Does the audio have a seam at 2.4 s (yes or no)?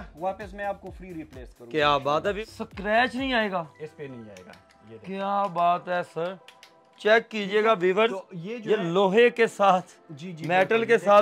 yes